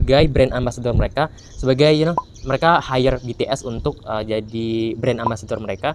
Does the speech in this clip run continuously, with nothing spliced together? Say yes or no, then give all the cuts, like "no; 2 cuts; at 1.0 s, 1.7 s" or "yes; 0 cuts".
yes; 0 cuts